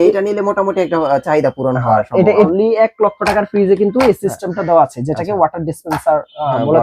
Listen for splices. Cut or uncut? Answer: cut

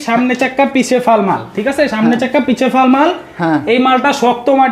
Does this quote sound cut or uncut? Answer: uncut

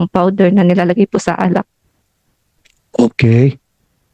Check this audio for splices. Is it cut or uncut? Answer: uncut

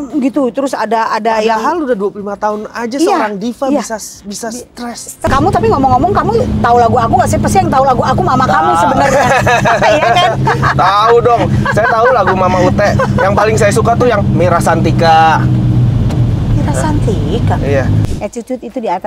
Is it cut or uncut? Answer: cut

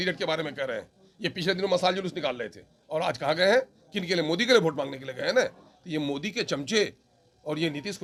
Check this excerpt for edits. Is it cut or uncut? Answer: uncut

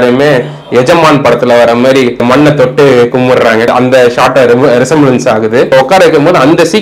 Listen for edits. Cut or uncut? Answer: cut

